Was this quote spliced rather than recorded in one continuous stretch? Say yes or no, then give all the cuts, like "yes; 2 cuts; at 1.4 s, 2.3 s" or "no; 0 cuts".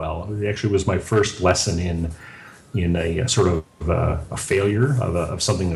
no; 0 cuts